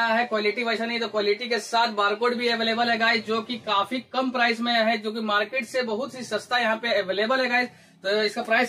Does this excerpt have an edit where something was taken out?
no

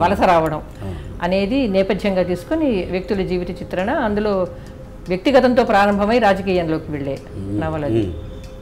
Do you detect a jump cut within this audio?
no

